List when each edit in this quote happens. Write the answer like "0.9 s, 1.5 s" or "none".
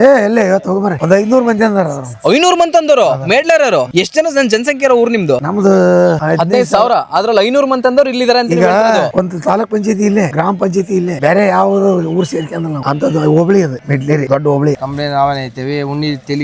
14.8 s